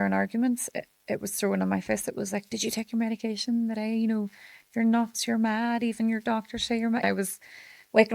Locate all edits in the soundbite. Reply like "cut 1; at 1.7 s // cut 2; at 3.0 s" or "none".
cut 1; at 7.0 s